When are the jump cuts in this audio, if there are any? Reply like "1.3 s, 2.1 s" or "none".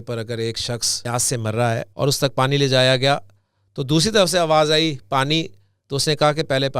0.9 s, 1.9 s